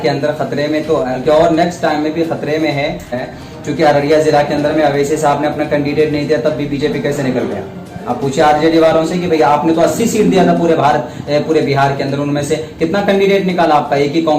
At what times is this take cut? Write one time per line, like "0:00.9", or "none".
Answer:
0:01.1
0:03.3